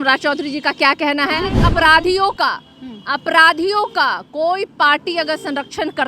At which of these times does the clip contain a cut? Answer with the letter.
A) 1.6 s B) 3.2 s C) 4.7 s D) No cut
A